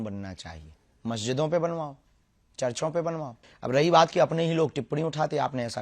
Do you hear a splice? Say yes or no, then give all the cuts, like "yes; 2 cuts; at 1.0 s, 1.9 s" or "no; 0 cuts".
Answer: yes; 1 cut; at 3.4 s